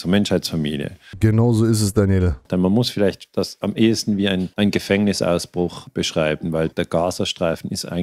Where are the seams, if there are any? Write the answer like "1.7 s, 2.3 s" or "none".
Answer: 1.1 s, 2.4 s, 4.5 s, 5.8 s, 6.7 s